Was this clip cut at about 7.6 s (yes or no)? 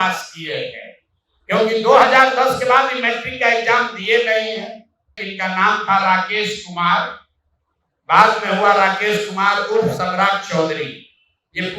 no